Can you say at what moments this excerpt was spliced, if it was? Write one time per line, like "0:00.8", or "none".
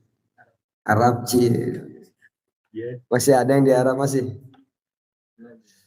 none